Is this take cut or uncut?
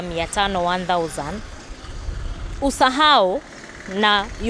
uncut